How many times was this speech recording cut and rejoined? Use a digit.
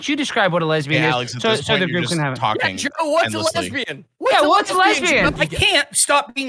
1